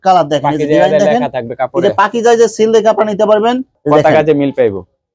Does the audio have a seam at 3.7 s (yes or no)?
yes